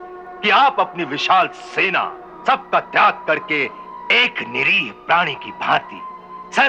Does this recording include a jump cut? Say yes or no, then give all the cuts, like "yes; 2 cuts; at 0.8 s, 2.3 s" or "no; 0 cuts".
yes; 1 cut; at 2.2 s